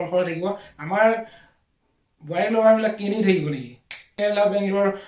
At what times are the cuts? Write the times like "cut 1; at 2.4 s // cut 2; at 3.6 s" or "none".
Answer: cut 1; at 4.1 s